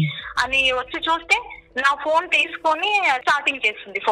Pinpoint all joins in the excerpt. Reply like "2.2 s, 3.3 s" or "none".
3.2 s